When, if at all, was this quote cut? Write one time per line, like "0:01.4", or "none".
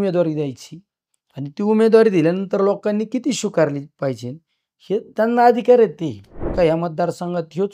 0:06.5